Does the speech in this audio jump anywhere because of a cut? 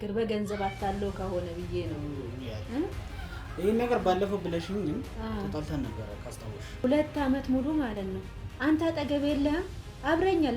yes; 1 cut; at 6.8 s

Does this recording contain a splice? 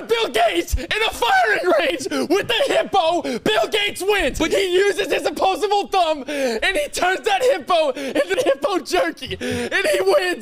yes; 2 cuts; at 4.5 s, 8.3 s

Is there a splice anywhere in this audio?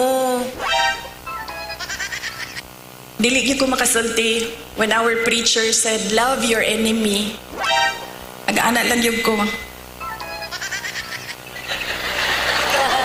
no; 0 cuts

